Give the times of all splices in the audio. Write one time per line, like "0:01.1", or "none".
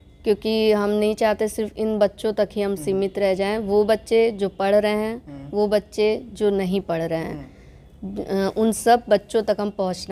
none